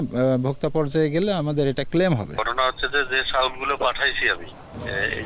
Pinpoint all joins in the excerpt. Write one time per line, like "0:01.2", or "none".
0:02.4